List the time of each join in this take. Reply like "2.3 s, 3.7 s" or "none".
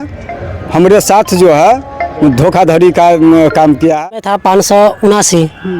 4.1 s

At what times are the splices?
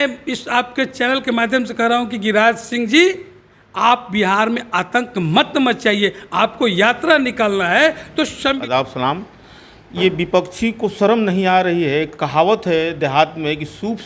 8.6 s

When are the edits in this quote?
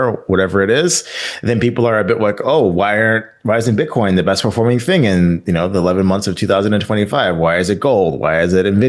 none

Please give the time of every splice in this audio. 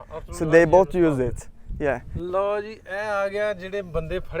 2.1 s

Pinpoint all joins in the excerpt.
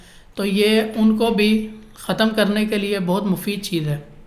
none

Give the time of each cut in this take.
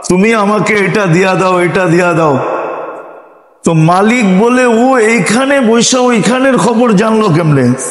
none

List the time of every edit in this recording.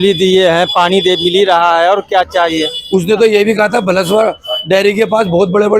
2.7 s

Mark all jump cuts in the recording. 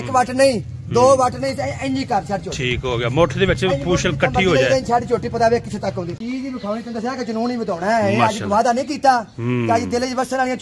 6.2 s

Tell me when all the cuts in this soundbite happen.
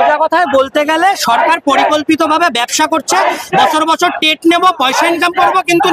none

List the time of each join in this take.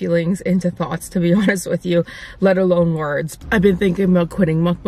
3.3 s

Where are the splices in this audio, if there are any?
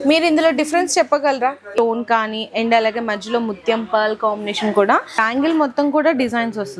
1.8 s, 5.2 s

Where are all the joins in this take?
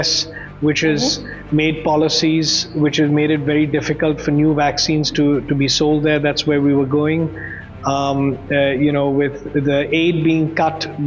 none

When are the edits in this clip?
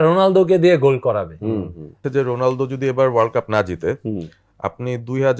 2.0 s

